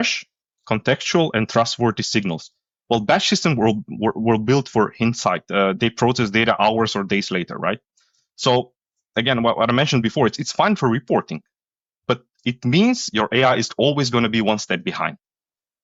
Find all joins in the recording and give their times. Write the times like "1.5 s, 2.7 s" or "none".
none